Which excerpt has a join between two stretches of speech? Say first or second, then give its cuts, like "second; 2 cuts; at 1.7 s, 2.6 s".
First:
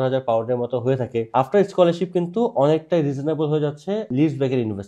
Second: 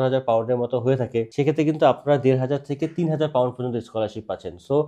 first; 2 cuts; at 1.3 s, 4.1 s